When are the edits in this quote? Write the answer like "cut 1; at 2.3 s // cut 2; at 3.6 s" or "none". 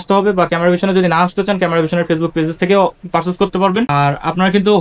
cut 1; at 3.9 s